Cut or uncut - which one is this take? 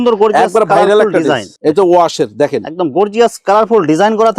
cut